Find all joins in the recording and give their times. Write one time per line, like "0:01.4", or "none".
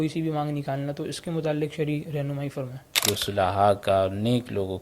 0:03.0